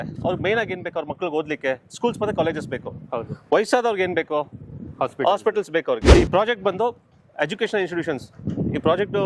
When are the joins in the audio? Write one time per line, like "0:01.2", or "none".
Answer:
0:06.0